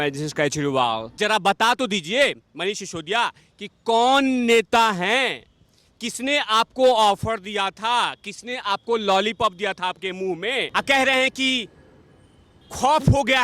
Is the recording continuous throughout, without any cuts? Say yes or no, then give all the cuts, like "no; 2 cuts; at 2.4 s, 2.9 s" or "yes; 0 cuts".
no; 2 cuts; at 1.1 s, 10.7 s